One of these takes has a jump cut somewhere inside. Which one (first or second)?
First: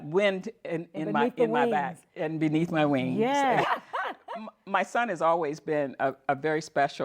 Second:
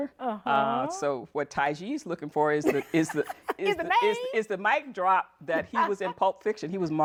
first